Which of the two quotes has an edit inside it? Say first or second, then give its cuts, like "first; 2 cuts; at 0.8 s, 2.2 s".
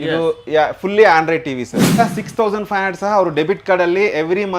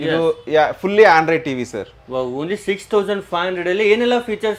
first; 1 cut; at 2.0 s